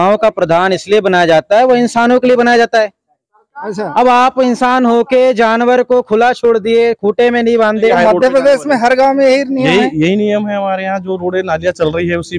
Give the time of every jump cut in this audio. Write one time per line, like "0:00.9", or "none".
0:07.9